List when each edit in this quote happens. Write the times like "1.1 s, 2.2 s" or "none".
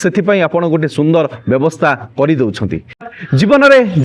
3.0 s